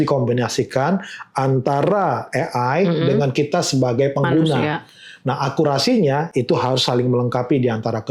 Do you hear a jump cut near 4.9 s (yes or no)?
no